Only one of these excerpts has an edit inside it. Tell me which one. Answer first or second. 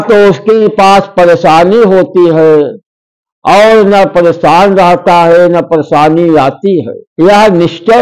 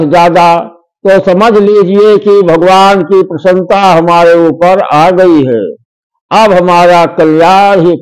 first